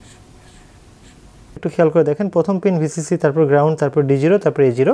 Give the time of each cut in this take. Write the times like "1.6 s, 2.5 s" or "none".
1.6 s